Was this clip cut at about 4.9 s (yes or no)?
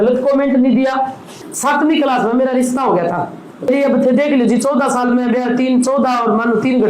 no